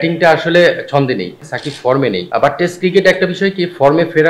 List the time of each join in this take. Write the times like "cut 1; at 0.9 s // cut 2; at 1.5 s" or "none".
cut 1; at 1.4 s // cut 2; at 2.2 s